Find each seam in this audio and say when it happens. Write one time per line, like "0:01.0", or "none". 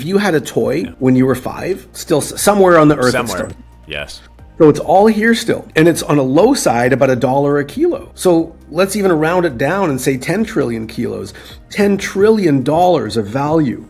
none